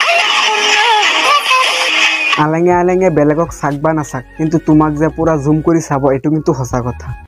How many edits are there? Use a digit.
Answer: 1